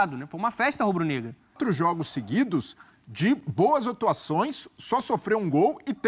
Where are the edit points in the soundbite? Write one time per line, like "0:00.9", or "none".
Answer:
0:01.6